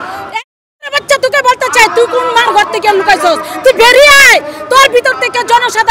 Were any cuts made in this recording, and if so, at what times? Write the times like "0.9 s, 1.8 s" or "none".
none